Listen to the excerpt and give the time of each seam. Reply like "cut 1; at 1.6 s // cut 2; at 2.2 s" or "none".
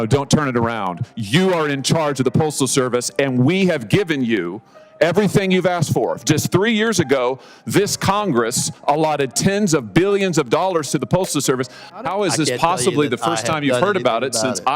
cut 1; at 12.0 s